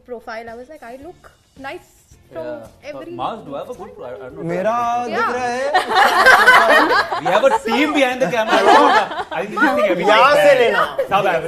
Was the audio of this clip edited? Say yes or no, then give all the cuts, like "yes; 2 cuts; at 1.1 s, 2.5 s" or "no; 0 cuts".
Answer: no; 0 cuts